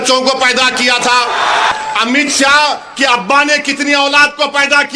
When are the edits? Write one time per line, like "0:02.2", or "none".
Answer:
0:01.7